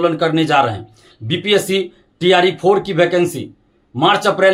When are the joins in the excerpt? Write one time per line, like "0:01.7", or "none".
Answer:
none